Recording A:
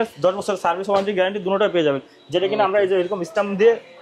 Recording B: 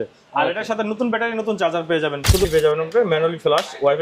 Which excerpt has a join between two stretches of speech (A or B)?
B